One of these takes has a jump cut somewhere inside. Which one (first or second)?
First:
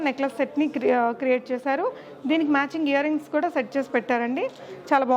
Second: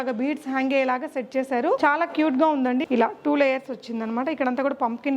second